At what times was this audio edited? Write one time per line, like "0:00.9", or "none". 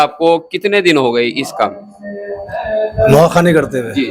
none

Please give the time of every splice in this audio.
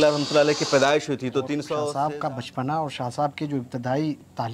0:01.9

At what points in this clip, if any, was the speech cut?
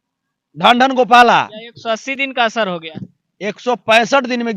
0:01.6

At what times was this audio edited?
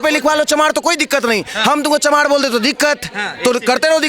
none

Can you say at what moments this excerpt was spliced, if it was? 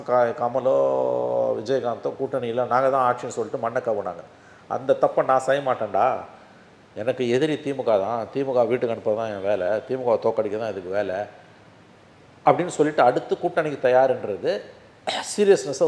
none

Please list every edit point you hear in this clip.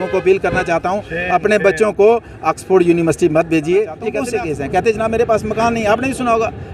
0:04.1

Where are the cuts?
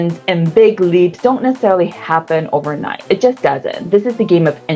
none

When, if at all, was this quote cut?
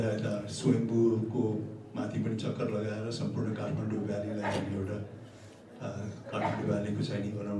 none

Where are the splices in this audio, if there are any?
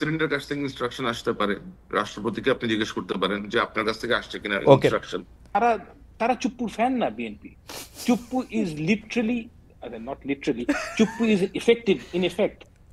0:05.4

